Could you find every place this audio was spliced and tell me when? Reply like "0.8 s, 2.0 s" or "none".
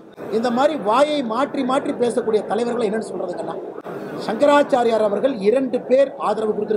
none